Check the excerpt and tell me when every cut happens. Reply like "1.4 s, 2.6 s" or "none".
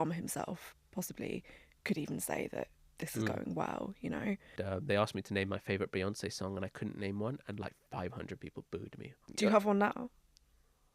4.5 s, 9.2 s